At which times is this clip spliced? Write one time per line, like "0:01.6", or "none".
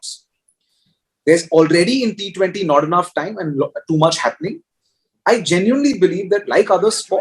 none